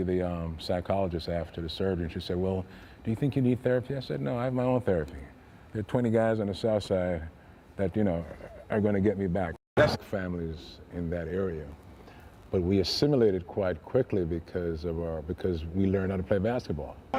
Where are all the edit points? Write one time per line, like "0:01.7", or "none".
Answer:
none

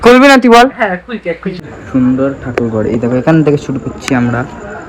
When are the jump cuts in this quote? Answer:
0:01.6

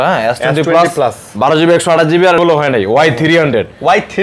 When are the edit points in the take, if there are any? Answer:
0:02.4

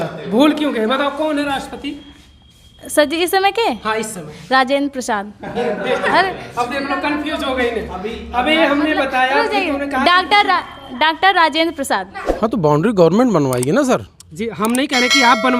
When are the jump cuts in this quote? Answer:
0:12.2

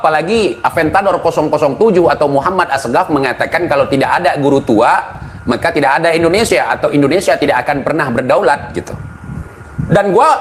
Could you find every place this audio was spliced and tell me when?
none

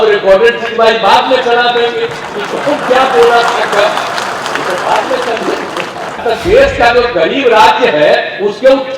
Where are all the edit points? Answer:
0:06.2

